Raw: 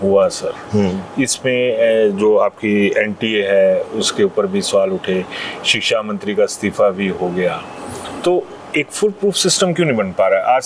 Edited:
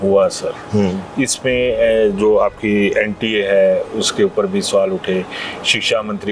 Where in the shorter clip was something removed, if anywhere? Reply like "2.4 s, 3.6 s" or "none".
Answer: none